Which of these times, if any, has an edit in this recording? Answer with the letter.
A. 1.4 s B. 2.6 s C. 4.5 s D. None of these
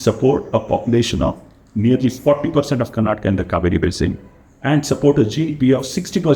D